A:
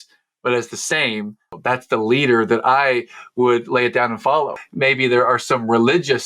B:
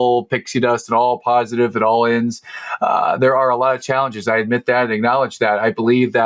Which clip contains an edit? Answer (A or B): A